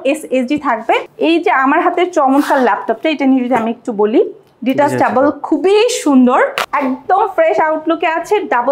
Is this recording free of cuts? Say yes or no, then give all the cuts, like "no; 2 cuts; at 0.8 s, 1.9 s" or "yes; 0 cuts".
no; 2 cuts; at 1.1 s, 6.6 s